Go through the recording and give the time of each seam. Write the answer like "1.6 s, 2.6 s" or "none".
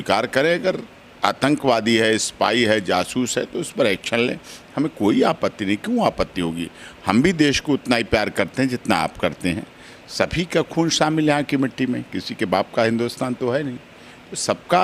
none